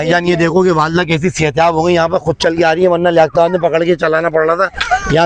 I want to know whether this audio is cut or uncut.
uncut